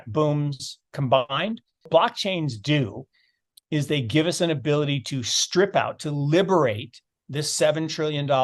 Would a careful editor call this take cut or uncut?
cut